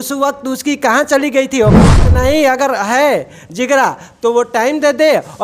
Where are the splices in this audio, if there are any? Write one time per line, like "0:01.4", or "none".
0:02.1